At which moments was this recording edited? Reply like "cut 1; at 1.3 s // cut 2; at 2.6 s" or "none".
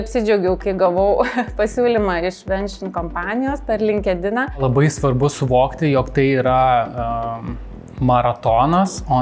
cut 1; at 4.6 s